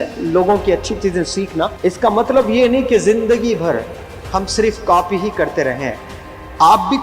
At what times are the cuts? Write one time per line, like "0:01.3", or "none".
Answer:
0:01.7